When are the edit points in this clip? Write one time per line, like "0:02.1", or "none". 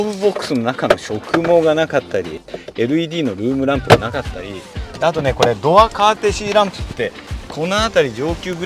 0:02.3

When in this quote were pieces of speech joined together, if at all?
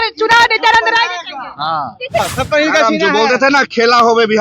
0:02.2

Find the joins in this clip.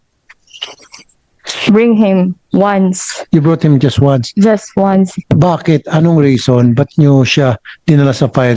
none

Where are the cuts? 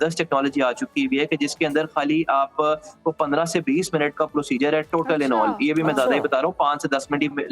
none

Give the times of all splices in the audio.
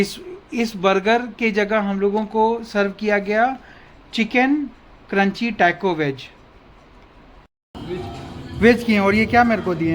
0:07.6

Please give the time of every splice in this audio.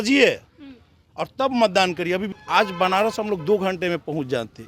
0:02.3

